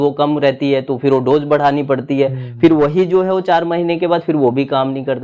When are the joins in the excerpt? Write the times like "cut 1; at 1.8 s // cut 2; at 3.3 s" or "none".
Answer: none